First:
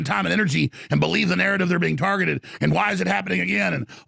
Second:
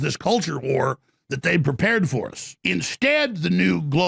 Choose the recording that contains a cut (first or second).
second